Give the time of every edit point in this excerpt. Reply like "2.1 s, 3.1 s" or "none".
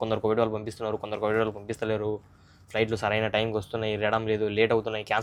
none